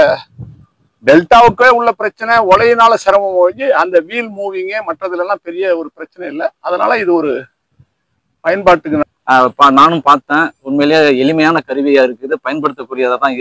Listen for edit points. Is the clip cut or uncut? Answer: cut